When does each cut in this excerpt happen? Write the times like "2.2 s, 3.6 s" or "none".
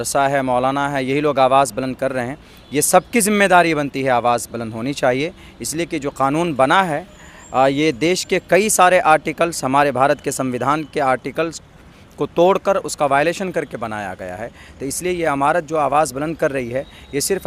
none